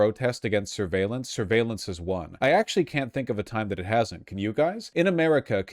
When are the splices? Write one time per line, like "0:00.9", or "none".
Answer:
0:02.3
0:04.8